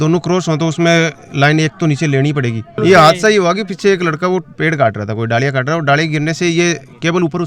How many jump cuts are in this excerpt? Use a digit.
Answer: 1